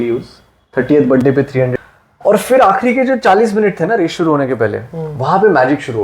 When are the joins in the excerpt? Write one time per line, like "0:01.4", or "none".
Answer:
0:01.7

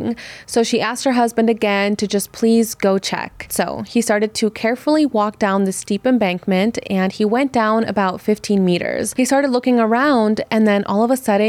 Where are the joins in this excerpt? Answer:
0:09.1

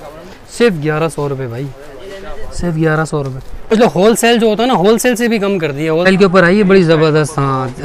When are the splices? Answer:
0:03.7
0:06.1

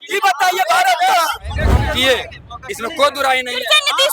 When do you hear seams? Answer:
0:01.7

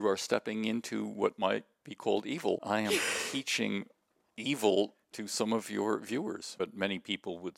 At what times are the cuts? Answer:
0:02.6
0:06.5

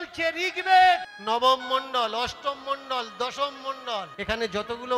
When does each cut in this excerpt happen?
0:01.1
0:04.1

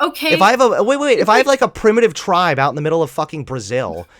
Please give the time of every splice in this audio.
none

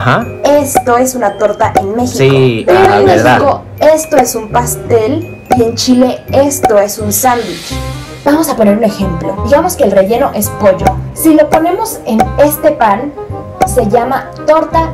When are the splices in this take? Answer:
0:08.1

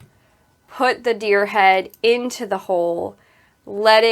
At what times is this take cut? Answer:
none

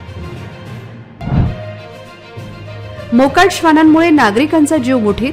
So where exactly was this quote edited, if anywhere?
0:01.0

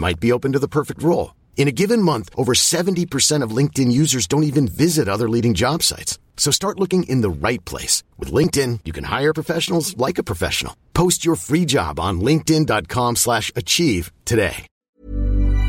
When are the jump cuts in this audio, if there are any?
0:14.7

